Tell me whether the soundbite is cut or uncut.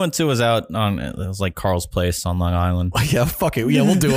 cut